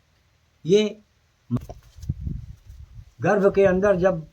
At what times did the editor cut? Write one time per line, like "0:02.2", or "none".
0:01.6